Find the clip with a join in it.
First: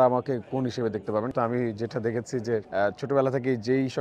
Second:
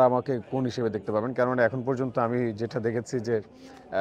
first; 2 cuts; at 1.3 s, 2.7 s

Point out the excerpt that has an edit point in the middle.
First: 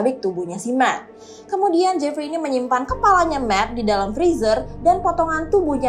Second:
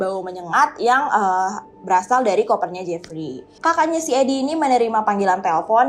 second; 1 cut; at 3.5 s

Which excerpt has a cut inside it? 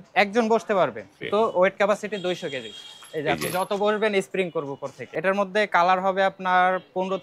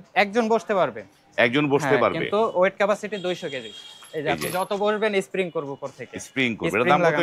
first; 2 cuts; at 1.2 s, 5.1 s

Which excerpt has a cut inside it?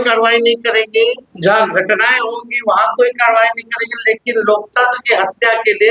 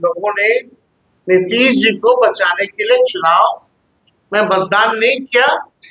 first; 1 cut; at 1.3 s

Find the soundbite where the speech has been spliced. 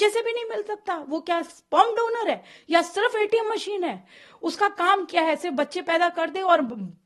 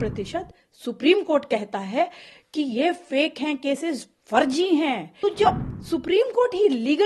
second; 1 cut; at 5.1 s

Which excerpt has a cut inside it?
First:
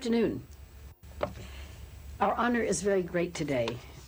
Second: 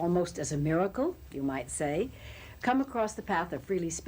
second; 1 cut; at 1.3 s

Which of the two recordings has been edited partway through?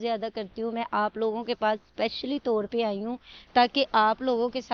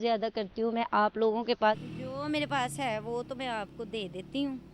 second; 1 cut; at 1.9 s

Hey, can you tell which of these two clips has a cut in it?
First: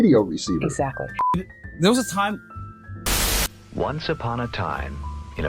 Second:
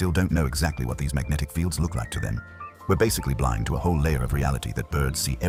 first; 1 cut; at 1.3 s

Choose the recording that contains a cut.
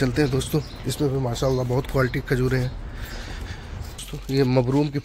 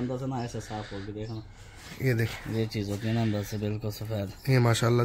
first; 1 cut; at 4.1 s

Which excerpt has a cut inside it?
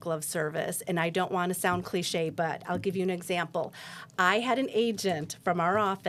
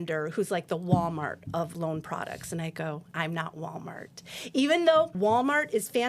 second; 3 cuts; at 1.7 s, 3.1 s, 5.1 s

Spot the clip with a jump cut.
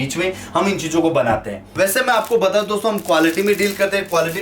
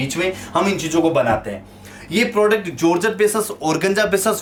first; 1 cut; at 1.6 s

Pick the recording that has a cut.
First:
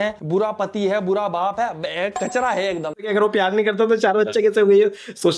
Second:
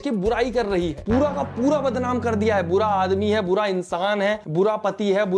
first; 1 cut; at 3.1 s

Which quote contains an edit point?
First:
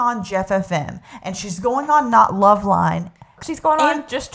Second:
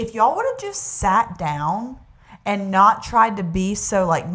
first; 1 cut; at 3.4 s

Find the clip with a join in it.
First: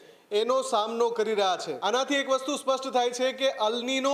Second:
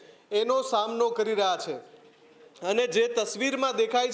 first; 1 cut; at 1.7 s

